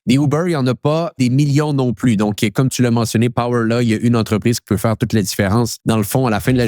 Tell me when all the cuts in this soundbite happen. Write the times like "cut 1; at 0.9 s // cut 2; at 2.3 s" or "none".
cut 1; at 1.1 s // cut 2; at 5.8 s

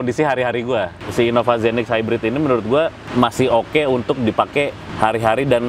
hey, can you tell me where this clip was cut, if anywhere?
cut 1; at 1.0 s // cut 2; at 3.0 s // cut 3; at 4.8 s

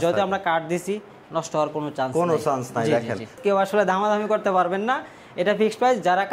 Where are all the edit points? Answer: cut 1; at 3.4 s

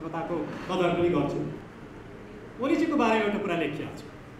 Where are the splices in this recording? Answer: none

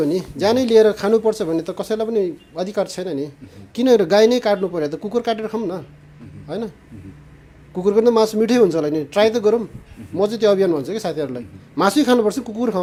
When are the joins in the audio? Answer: none

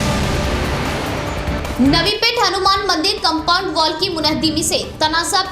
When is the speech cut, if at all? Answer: cut 1; at 1.6 s

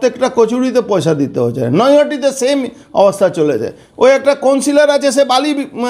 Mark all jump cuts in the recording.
none

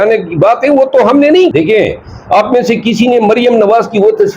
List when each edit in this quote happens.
cut 1; at 1.5 s

